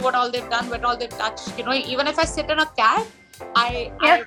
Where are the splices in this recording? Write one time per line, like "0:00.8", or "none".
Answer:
none

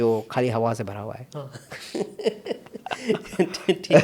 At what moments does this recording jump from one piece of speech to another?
none

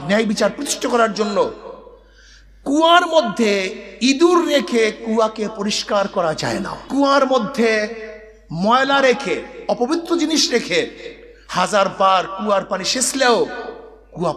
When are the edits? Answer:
0:06.8

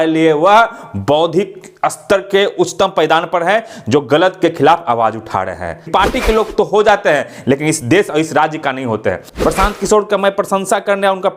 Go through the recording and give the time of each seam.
0:05.9
0:09.3

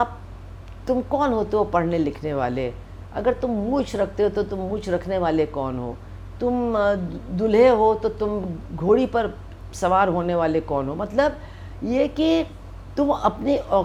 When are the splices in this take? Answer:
none

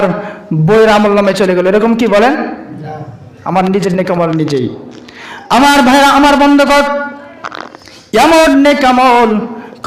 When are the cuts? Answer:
none

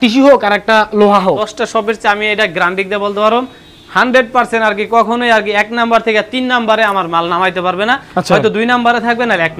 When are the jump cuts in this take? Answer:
0:01.5

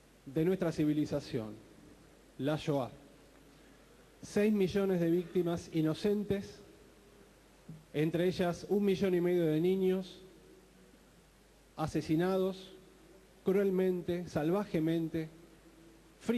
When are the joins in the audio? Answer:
0:12.3

